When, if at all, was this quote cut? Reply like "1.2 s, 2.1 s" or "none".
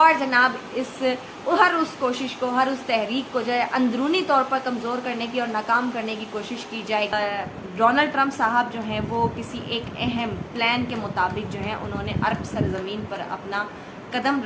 7.1 s